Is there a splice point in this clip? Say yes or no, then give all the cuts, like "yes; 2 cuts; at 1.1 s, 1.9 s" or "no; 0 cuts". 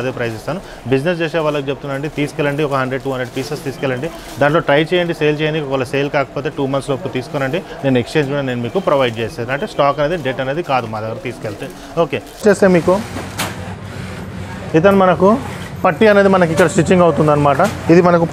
yes; 1 cut; at 12.4 s